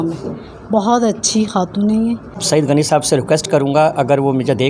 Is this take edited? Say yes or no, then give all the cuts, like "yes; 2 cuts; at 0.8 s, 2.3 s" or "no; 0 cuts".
yes; 1 cut; at 2.3 s